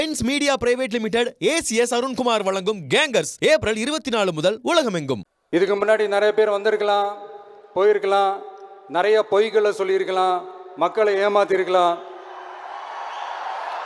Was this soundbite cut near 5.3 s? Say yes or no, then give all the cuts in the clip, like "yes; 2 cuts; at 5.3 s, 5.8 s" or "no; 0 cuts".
yes; 1 cut; at 5.3 s